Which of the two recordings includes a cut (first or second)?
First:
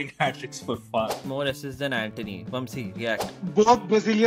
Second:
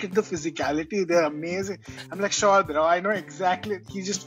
first